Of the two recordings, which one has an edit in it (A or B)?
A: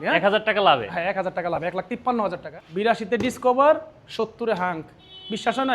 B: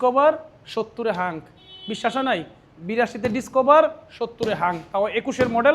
A